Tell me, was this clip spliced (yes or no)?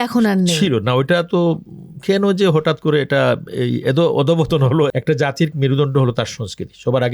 yes